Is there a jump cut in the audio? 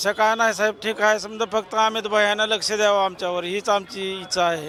no; 0 cuts

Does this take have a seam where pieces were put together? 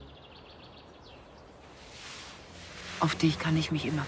no; 0 cuts

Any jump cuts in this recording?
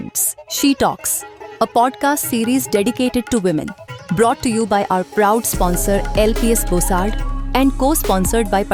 no; 0 cuts

